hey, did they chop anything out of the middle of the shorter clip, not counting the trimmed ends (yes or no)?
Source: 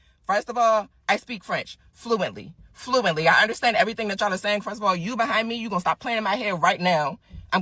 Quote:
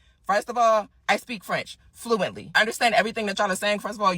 yes